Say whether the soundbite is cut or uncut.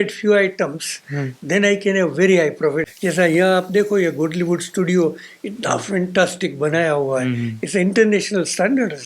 cut